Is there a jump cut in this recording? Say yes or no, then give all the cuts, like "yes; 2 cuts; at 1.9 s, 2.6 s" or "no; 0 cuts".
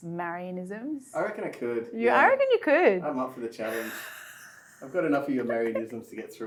no; 0 cuts